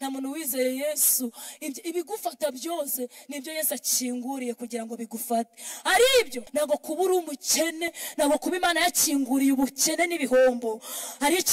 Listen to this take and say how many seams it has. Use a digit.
1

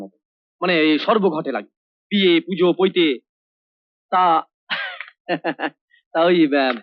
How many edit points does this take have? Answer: 0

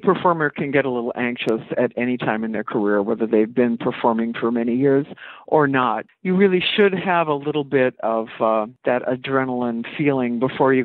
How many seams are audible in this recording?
2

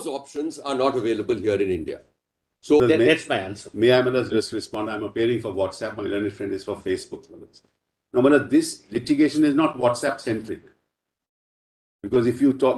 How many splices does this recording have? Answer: 1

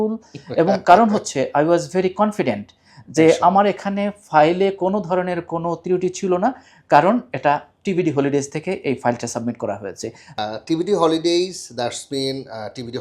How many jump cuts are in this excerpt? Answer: 1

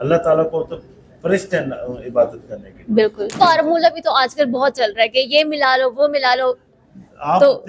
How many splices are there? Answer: 1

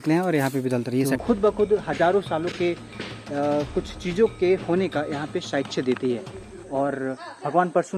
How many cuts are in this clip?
1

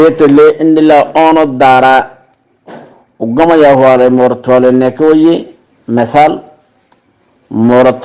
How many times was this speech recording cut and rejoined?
0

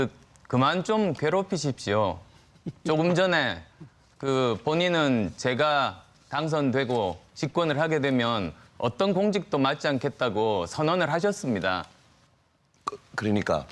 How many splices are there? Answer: 0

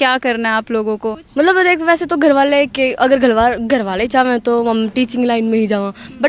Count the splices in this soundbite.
1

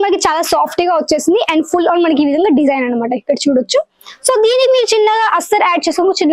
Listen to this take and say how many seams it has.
0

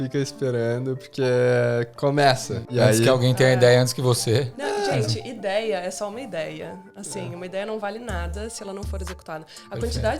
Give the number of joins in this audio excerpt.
2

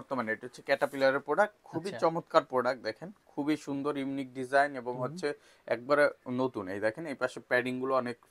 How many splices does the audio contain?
0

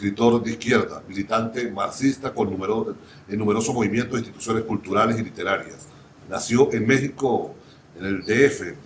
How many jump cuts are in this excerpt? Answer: 1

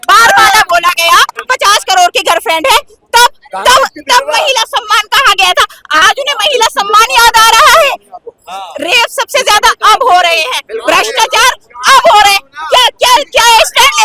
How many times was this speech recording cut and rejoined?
2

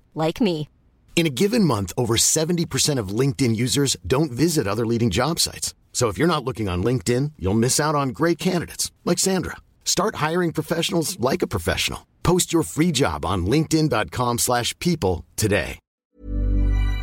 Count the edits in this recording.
1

